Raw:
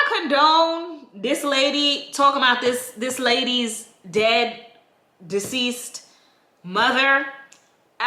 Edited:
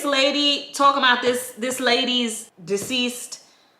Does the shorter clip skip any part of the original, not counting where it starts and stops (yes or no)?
yes